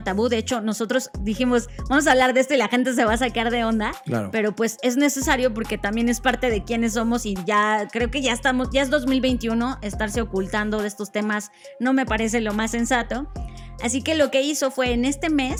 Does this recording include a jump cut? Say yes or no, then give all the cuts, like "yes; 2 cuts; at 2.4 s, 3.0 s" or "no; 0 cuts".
no; 0 cuts